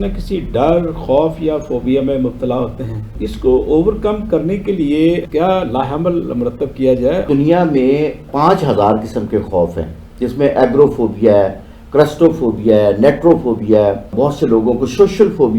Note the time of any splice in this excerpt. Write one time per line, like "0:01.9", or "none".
0:03.2
0:07.3